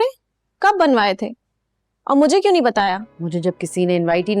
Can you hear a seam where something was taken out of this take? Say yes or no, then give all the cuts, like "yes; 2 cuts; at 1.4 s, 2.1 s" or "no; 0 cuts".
yes; 1 cut; at 3.1 s